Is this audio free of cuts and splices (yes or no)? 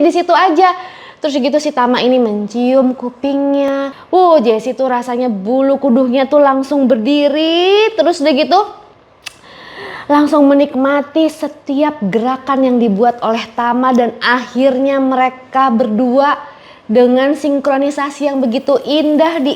no